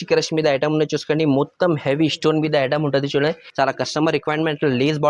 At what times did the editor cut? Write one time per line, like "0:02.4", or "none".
0:03.4